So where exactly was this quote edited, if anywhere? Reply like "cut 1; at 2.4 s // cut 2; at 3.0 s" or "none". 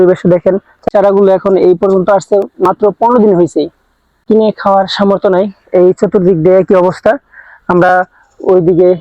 cut 1; at 0.9 s // cut 2; at 4.2 s